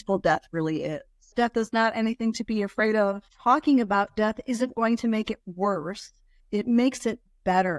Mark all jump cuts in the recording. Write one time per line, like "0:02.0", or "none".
0:01.3
0:03.2
0:06.4